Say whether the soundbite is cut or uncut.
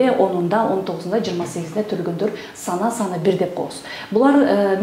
uncut